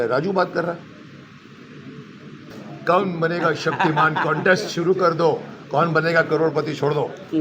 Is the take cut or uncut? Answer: cut